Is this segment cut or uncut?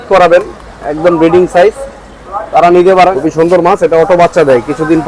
cut